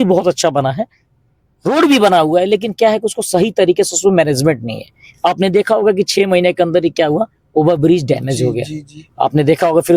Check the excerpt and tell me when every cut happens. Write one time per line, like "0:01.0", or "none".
none